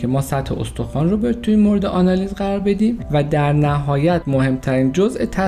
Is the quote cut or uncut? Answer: cut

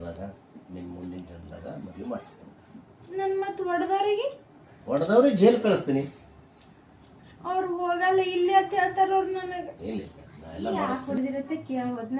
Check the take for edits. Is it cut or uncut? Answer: cut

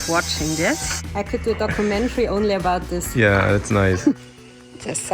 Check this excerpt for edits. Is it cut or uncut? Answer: cut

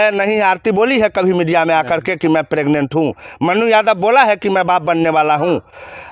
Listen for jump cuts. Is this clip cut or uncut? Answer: uncut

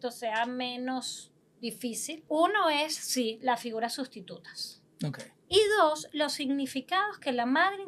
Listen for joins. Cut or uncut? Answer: cut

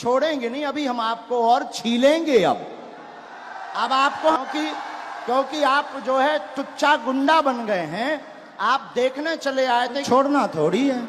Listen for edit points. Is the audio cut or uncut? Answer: cut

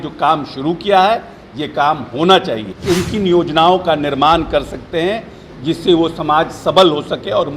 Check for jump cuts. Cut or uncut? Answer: cut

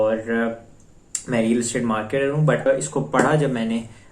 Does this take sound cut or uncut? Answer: cut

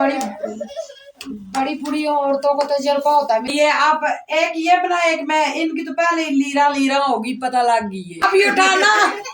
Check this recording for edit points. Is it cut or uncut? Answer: cut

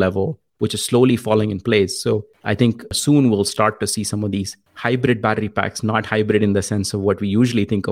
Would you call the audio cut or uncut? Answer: cut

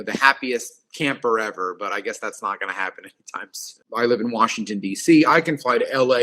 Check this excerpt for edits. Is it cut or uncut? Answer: cut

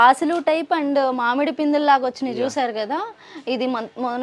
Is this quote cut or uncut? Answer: uncut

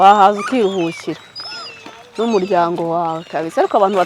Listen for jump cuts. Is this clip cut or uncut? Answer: uncut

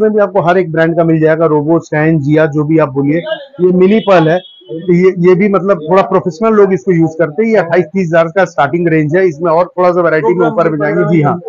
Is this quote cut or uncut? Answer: uncut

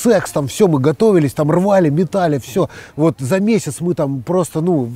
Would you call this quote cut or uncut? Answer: uncut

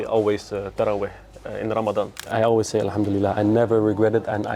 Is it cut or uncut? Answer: cut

